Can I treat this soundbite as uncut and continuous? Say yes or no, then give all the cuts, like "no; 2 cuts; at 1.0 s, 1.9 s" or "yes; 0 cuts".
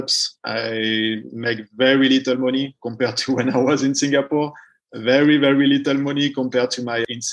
yes; 0 cuts